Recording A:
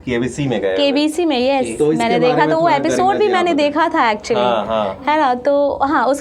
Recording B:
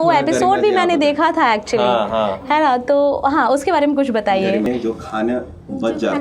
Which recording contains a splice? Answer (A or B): B